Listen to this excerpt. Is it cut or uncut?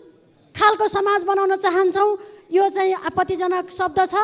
uncut